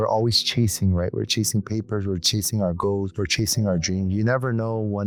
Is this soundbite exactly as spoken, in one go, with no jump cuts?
yes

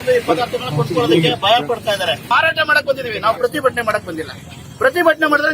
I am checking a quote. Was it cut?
yes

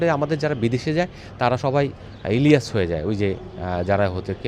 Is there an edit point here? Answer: no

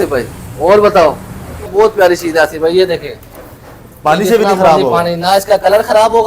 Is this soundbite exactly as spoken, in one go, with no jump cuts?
no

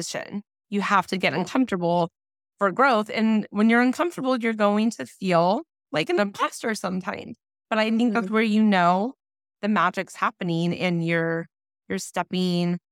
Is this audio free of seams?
yes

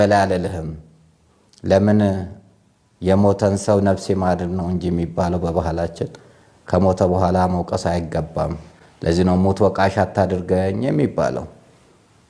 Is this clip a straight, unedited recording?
yes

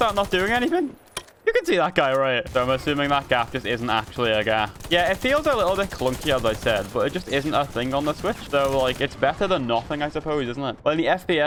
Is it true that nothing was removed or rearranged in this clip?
yes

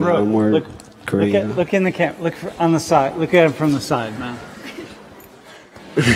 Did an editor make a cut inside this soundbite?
no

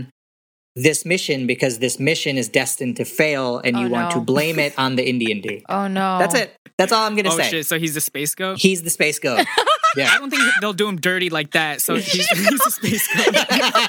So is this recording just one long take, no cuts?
yes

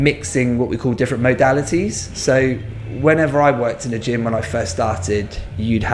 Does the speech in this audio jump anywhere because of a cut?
no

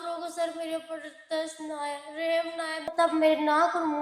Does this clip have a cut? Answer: yes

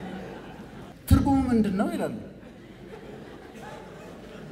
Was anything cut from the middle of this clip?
yes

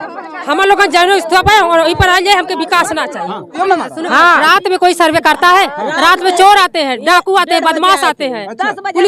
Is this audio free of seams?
no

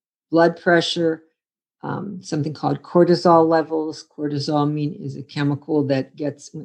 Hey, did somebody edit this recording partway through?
no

